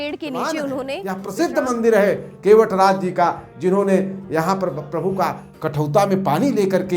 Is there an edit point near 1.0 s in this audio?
yes; 1 cut; at 1.0 s

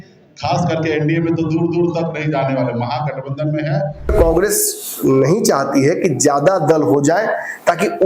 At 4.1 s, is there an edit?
yes; 1 cut; at 4.1 s

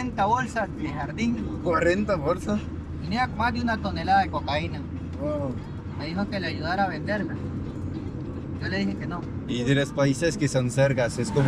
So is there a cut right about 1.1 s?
no; 0 cuts

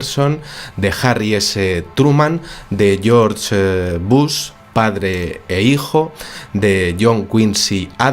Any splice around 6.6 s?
no; 1 cut; at 1.3 s

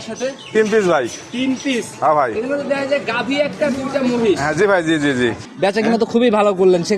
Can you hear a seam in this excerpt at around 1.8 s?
no; 1 cut; at 5.4 s

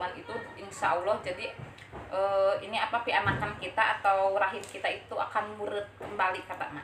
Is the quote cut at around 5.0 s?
no; 0 cuts

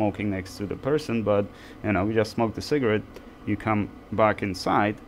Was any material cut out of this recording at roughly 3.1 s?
no; 0 cuts

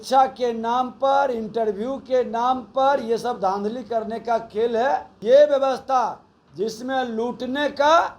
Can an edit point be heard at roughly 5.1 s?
yes; 1 cut; at 5.1 s

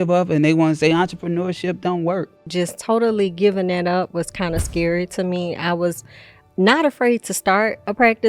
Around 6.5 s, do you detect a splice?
no; 1 cut; at 2.4 s

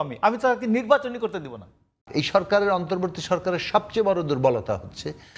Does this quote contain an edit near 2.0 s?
yes; 1 cut; at 2.0 s

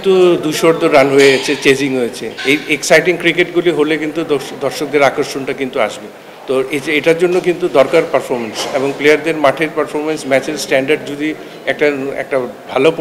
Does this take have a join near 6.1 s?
no; 0 cuts

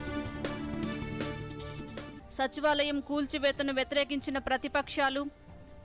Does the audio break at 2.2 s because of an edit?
yes; 1 cut; at 2.2 s

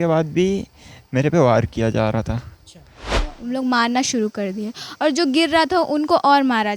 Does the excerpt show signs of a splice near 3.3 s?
yes; 1 cut; at 3.3 s

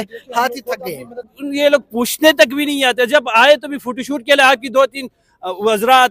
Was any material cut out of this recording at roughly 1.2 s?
yes; 1 cut; at 1.2 s

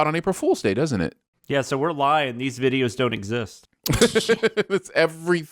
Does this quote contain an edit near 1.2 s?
yes; 1 cut; at 1.2 s

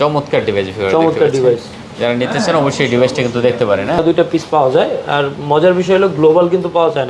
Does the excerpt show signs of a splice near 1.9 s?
no; 1 cut; at 4.0 s

